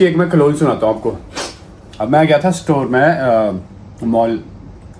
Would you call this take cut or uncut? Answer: uncut